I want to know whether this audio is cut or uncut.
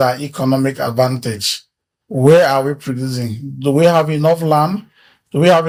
uncut